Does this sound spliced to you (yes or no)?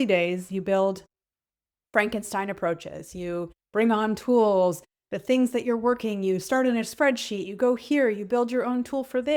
no